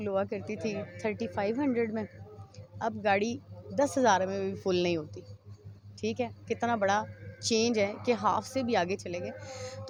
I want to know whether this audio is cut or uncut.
uncut